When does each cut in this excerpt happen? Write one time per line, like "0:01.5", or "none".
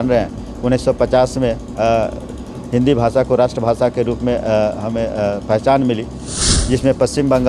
0:06.4